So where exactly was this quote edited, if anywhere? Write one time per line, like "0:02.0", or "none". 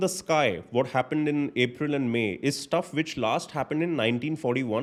none

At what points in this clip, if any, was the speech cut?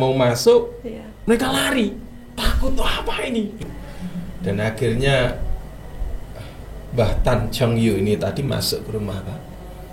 0:03.6

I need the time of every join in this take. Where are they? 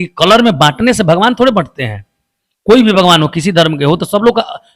none

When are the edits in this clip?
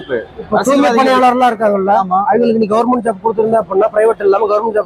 none

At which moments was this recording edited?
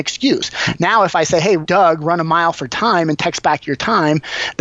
0:01.6

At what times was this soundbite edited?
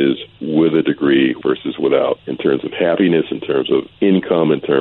0:01.4
0:02.3
0:03.9

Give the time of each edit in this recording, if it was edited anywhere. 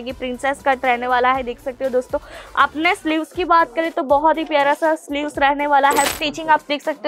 0:06.1

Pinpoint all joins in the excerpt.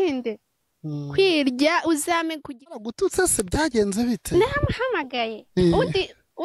0:02.8

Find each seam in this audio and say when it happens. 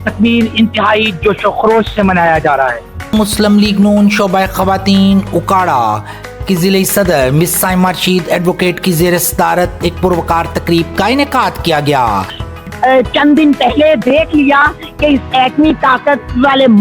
0:03.1
0:12.4

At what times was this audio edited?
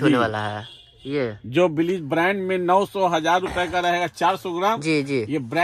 none

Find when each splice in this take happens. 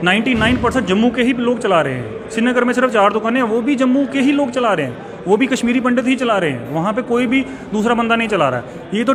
none

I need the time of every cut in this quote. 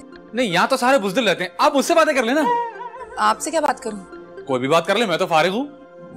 none

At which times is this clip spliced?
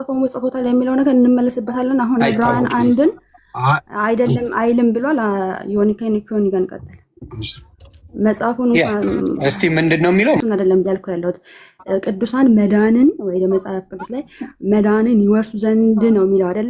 0:10.4

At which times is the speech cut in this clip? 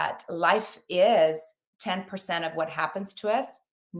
none

